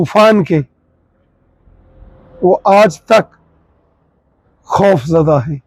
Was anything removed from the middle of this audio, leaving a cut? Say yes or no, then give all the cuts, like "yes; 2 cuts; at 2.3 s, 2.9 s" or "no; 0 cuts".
no; 0 cuts